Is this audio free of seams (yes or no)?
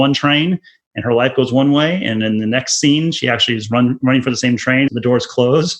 no